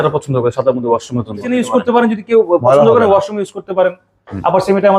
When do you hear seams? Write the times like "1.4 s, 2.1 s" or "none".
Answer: 1.5 s